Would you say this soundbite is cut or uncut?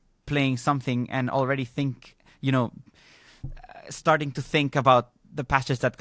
uncut